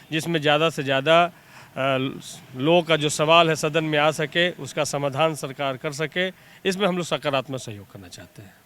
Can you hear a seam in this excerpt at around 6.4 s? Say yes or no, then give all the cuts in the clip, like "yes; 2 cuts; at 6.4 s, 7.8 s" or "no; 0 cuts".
no; 0 cuts